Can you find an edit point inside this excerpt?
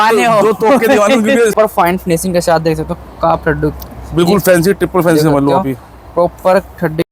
yes; 1 cut; at 1.5 s

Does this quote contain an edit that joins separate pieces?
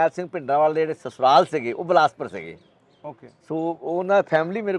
no; 0 cuts

